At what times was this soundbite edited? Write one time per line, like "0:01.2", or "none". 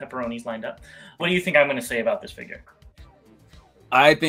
0:01.2